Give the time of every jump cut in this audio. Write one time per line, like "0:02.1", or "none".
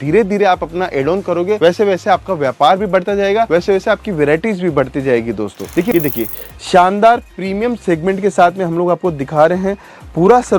0:05.9